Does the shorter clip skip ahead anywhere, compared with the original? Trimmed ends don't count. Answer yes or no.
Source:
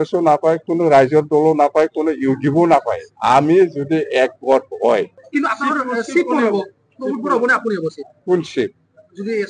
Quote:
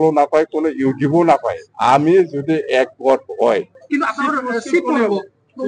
no